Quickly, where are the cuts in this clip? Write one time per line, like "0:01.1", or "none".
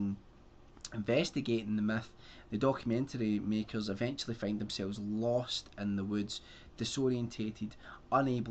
0:03.8